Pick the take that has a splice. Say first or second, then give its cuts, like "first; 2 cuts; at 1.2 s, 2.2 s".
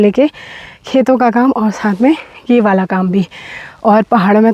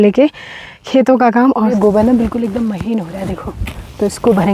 second; 1 cut; at 1.8 s